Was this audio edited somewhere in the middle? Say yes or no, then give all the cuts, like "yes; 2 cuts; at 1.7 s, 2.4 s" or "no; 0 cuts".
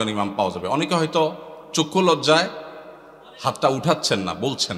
no; 0 cuts